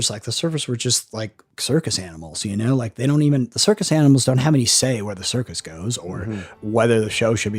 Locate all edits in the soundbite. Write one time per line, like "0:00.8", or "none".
0:01.5
0:06.5